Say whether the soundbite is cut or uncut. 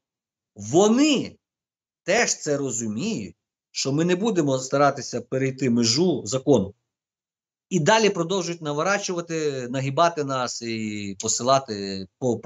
uncut